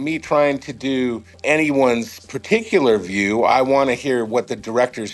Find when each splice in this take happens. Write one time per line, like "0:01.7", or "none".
0:01.3
0:03.5

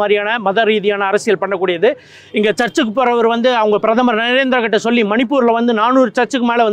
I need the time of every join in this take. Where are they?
none

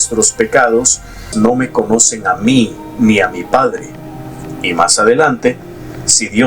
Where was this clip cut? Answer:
0:01.3

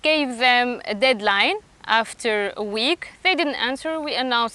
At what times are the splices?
none

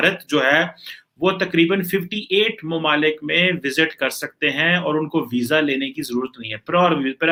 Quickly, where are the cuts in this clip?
none

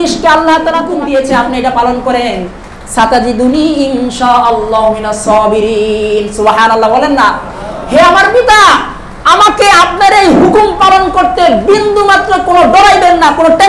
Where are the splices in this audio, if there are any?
0:00.9

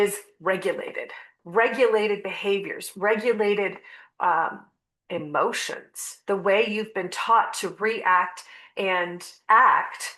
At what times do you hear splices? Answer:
0:01.3

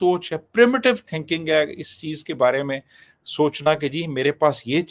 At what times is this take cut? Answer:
none

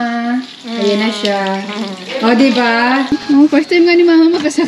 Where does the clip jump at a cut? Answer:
0:03.2

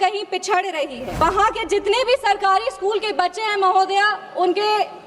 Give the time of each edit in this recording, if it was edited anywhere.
0:01.2

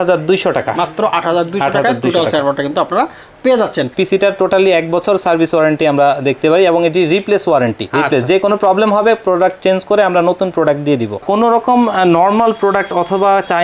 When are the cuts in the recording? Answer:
0:03.9
0:07.8
0:11.2

